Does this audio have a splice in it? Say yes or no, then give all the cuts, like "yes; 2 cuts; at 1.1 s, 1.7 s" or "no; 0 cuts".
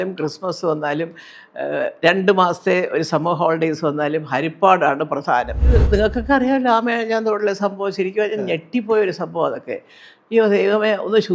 yes; 1 cut; at 5.8 s